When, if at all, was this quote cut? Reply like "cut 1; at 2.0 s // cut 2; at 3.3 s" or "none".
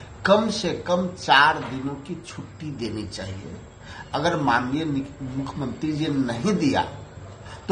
none